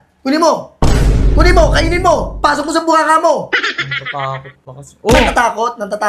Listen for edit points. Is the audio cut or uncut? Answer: uncut